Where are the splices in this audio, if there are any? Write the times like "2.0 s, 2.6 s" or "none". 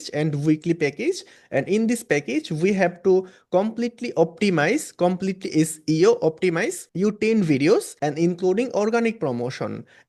none